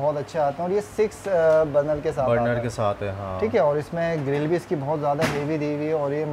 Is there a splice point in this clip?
no; 0 cuts

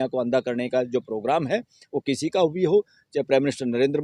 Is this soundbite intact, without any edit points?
yes; 0 cuts

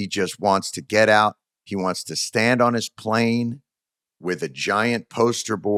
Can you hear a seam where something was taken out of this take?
no; 0 cuts

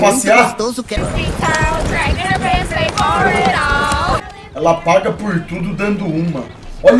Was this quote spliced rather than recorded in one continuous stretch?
yes; 2 cuts; at 1.0 s, 4.2 s

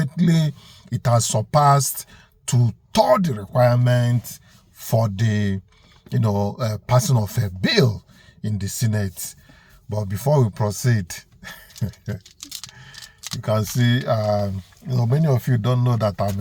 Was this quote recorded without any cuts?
yes; 0 cuts

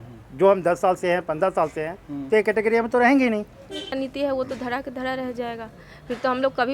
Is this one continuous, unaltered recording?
no; 1 cut; at 4.0 s

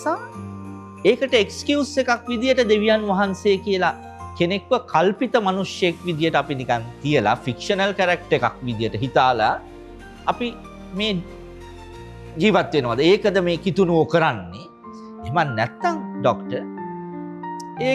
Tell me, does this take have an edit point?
no; 0 cuts

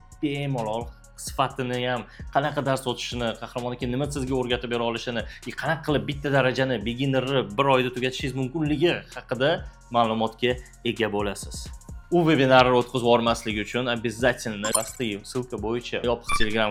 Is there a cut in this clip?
no; 0 cuts

